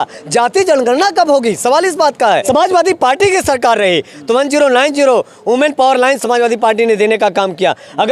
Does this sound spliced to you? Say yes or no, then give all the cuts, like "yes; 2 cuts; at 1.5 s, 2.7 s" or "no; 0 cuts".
yes; 1 cut; at 2.4 s